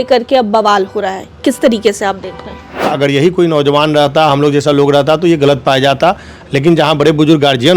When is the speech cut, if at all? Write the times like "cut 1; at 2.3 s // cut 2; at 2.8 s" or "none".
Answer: cut 1; at 2.9 s